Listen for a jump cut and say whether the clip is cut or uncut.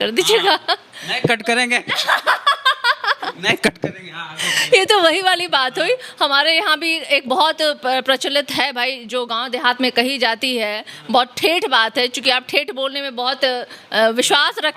uncut